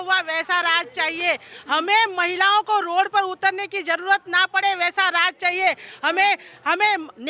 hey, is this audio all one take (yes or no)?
yes